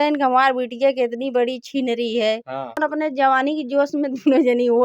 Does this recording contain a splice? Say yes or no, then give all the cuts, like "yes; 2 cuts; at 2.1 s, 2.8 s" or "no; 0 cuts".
yes; 1 cut; at 2.8 s